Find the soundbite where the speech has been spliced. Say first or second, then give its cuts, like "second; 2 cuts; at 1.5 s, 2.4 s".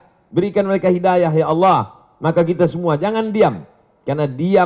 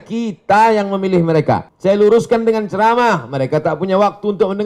second; 1 cut; at 1.7 s